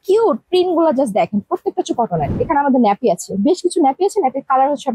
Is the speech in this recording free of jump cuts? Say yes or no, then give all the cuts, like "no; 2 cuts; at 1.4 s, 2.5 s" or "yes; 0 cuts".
no; 1 cut; at 2.4 s